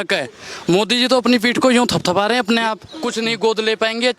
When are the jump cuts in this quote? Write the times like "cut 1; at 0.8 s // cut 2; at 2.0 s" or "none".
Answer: cut 1; at 2.9 s